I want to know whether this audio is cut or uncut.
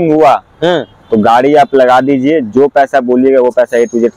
uncut